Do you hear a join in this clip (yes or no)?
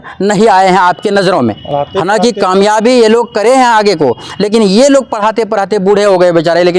no